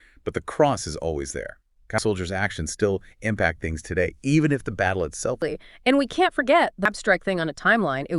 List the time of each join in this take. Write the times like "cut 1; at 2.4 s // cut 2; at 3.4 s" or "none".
cut 1; at 2.0 s // cut 2; at 5.5 s // cut 3; at 6.9 s